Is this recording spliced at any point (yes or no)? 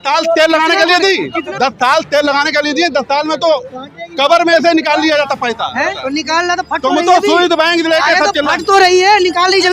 yes